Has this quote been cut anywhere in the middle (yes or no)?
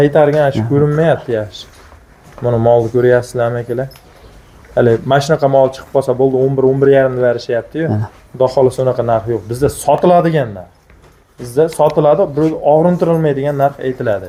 no